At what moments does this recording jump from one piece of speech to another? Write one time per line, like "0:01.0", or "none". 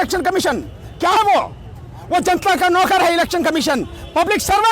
0:01.2